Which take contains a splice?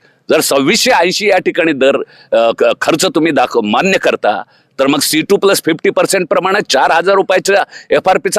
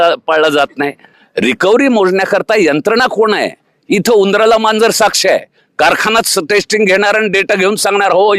second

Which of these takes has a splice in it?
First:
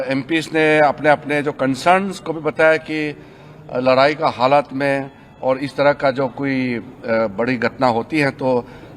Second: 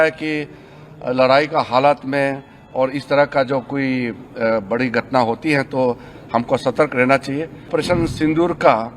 second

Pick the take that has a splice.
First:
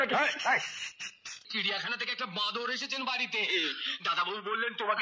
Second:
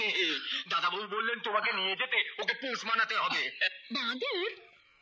first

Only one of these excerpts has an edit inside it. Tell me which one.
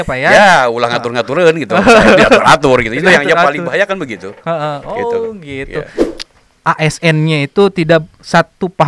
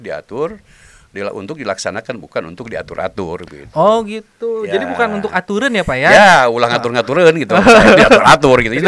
first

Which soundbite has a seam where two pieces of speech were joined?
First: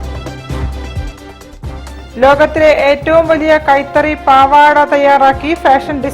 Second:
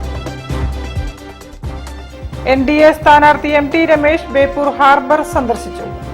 second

